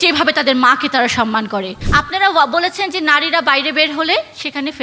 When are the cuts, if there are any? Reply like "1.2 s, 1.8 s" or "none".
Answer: 1.8 s